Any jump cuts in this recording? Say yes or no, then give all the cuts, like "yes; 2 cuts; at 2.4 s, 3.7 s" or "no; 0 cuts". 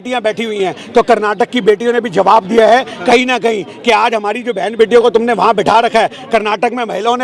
no; 0 cuts